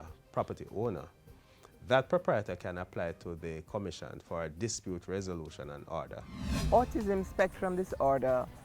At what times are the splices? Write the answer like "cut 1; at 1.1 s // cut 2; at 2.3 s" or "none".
cut 1; at 6.3 s